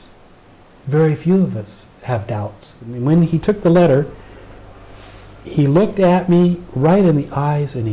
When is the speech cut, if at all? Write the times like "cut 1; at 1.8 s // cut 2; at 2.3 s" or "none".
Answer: cut 1; at 2.9 s